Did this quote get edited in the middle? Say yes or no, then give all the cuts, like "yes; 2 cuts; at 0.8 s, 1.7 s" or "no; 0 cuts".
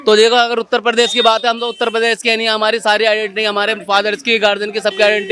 no; 0 cuts